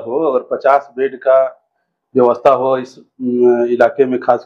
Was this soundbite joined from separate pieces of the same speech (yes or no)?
no